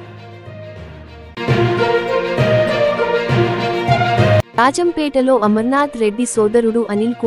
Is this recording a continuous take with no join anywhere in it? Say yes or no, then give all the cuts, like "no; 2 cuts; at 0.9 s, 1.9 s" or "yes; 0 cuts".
no; 2 cuts; at 1.3 s, 4.5 s